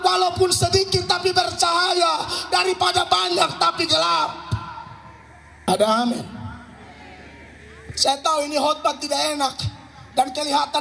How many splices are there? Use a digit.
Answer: 2